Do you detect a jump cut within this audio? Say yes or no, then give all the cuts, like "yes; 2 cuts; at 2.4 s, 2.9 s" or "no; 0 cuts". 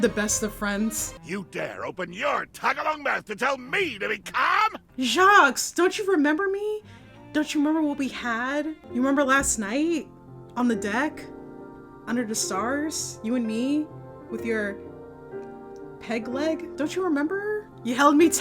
yes; 2 cuts; at 1.1 s, 4.8 s